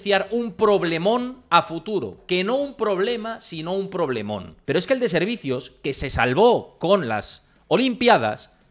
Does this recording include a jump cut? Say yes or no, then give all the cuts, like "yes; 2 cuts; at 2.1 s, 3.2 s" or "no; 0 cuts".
yes; 1 cut; at 4.5 s